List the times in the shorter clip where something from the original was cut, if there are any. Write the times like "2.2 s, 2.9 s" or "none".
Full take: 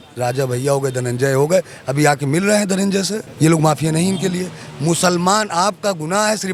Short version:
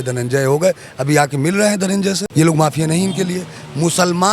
2.2 s